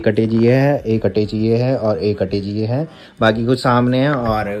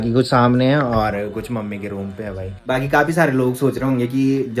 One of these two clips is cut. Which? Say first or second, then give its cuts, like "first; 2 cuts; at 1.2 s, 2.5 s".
second; 1 cut; at 2.6 s